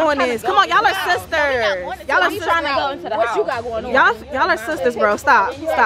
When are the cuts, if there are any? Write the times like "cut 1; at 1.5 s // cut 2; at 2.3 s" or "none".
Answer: none